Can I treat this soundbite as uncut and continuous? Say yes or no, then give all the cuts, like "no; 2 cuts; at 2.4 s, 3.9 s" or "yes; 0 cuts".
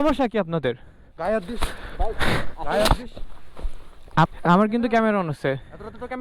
no; 1 cut; at 4.3 s